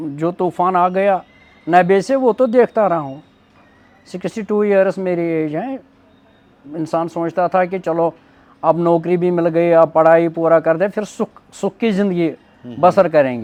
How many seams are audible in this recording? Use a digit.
0